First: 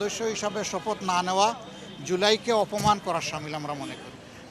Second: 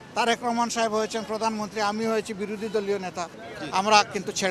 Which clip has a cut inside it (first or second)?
second